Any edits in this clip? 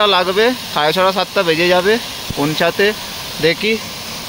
no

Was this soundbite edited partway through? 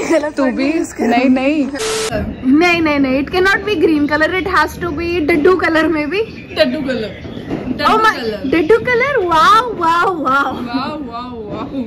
yes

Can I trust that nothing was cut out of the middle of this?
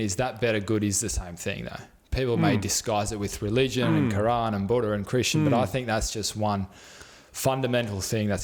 yes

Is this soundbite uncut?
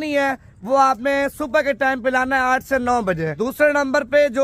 no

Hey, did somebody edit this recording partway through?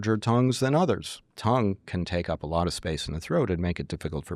yes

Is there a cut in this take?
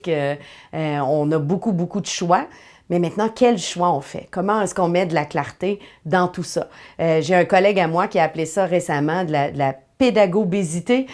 no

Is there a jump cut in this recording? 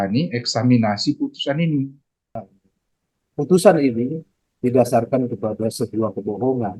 yes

